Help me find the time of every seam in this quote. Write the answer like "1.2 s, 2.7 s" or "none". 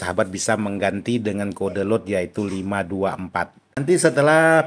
3.6 s